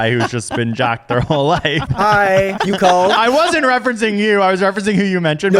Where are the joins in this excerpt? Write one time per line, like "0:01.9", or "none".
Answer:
0:01.9
0:02.6